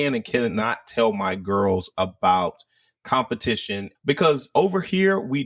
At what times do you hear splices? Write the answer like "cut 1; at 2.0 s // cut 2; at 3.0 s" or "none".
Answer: cut 1; at 3.9 s